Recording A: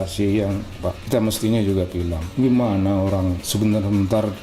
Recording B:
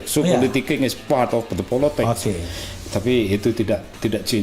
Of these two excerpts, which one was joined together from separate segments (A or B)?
A